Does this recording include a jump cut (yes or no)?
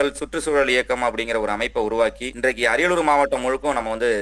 yes